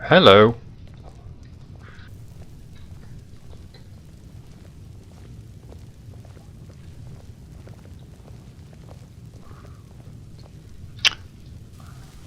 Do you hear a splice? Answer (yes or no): yes